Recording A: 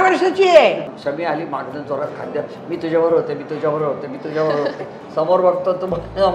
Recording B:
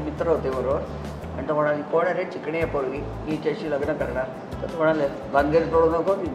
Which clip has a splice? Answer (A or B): A